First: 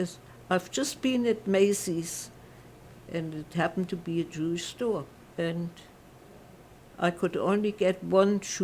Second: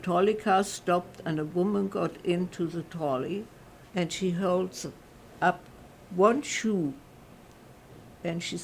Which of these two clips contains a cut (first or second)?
first